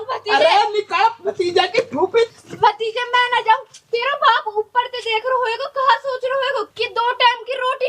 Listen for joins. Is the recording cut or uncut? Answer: cut